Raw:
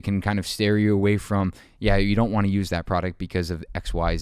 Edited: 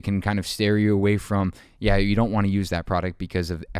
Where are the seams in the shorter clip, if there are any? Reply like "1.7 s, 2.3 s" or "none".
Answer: none